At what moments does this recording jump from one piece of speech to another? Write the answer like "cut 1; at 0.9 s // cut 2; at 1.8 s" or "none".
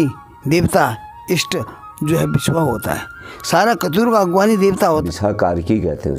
cut 1; at 5.0 s